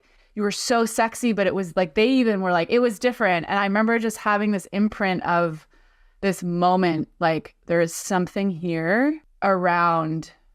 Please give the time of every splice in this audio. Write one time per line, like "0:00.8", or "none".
0:09.3